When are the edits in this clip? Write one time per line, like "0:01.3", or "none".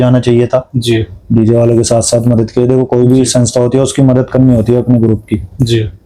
none